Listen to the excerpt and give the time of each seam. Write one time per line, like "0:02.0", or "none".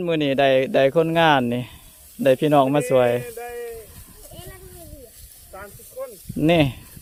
none